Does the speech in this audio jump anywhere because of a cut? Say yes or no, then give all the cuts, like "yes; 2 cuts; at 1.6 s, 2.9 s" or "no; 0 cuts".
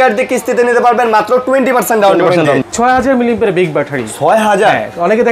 yes; 1 cut; at 2.6 s